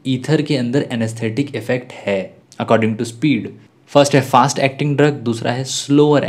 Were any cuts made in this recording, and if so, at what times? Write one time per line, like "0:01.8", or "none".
0:02.4